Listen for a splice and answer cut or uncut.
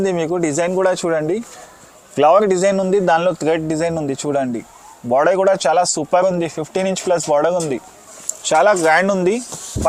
uncut